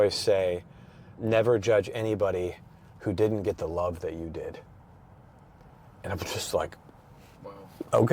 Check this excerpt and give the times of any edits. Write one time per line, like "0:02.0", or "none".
none